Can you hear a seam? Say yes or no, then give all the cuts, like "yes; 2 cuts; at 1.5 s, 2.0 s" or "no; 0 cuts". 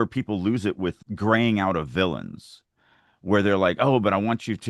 yes; 1 cut; at 1.0 s